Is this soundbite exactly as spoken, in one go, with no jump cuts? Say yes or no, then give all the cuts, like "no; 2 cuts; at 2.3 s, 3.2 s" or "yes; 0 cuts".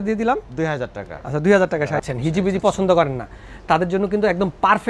no; 1 cut; at 2.0 s